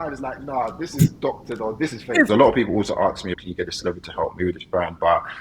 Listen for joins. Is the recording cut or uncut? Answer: cut